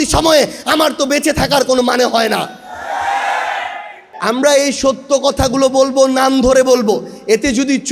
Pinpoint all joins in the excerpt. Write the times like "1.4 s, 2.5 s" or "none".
4.1 s